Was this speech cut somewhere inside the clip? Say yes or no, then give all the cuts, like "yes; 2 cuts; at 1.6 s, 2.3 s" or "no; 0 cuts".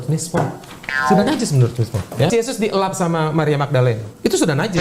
yes; 1 cut; at 2.3 s